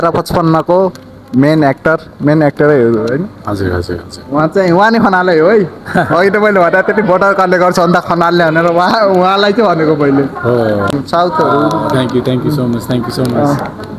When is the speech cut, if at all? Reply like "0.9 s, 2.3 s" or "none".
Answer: 10.9 s